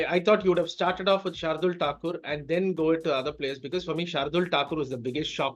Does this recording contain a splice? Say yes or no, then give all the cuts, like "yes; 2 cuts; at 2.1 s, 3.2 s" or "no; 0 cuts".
no; 0 cuts